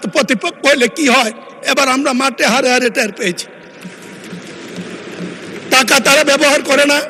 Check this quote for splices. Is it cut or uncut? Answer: uncut